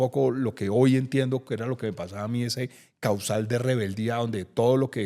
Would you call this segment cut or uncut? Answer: uncut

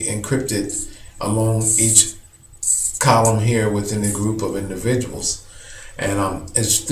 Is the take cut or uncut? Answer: uncut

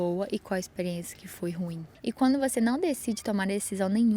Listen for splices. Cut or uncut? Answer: cut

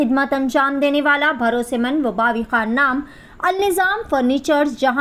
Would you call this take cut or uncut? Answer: uncut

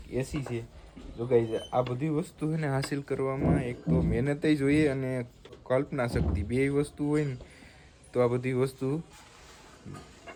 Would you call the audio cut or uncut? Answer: uncut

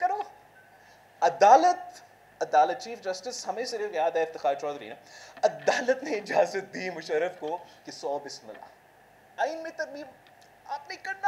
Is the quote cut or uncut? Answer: uncut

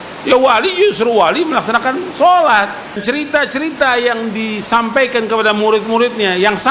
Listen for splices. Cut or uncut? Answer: cut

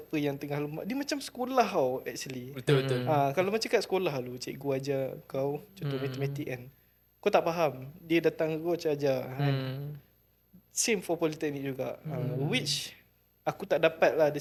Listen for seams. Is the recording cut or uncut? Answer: uncut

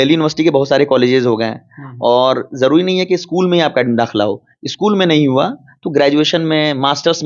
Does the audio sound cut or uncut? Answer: uncut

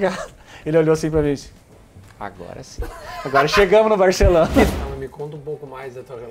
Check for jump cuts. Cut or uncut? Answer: cut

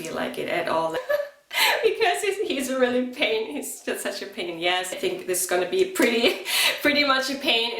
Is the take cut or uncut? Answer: cut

